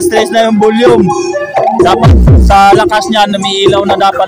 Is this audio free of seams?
yes; 0 cuts

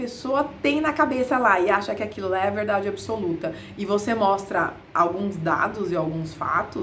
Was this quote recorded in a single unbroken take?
yes; 0 cuts

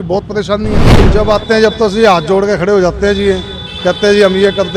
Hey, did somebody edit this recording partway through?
yes; 1 cut; at 1.0 s

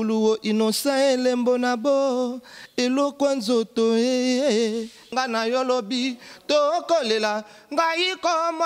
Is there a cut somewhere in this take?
yes; 1 cut; at 5.1 s

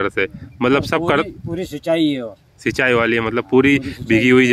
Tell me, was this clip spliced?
no; 0 cuts

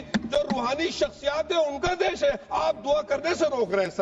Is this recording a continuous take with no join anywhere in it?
yes; 0 cuts

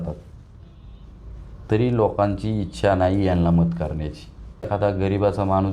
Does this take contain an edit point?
yes; 1 cut; at 4.7 s

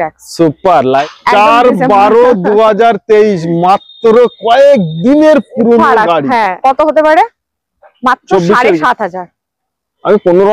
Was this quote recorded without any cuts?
no; 2 cuts; at 1.0 s, 6.5 s

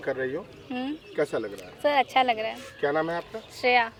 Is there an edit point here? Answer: no; 0 cuts

